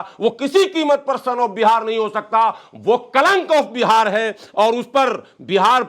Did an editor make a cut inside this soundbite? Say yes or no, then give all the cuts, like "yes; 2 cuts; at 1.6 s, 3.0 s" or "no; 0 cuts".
no; 0 cuts